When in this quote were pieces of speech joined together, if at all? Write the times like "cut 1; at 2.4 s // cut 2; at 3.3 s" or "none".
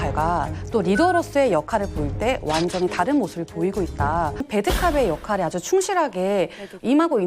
cut 1; at 4.5 s